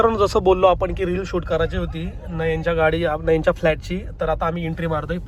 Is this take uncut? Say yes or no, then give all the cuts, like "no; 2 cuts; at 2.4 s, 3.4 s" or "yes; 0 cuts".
yes; 0 cuts